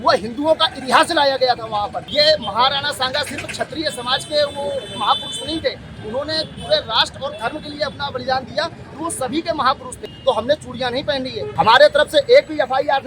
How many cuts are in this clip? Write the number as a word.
three